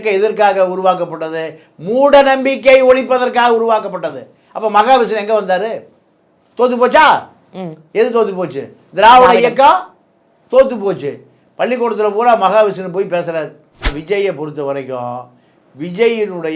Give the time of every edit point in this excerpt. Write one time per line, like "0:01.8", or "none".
0:14.0